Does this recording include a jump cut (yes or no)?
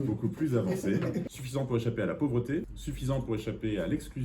yes